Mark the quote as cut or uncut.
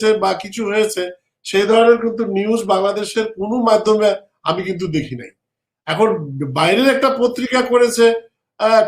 uncut